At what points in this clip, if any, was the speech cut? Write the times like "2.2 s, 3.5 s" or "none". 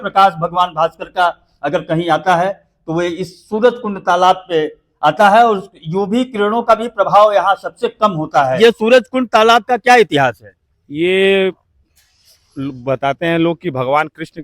8.5 s